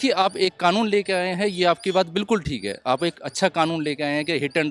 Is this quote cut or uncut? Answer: uncut